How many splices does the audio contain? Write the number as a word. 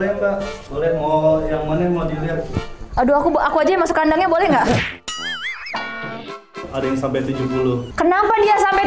two